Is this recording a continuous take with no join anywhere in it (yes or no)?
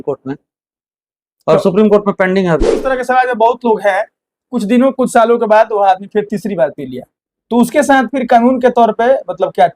no